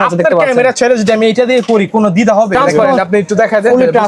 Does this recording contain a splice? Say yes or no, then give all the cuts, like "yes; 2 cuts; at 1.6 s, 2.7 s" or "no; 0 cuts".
yes; 1 cut; at 2.5 s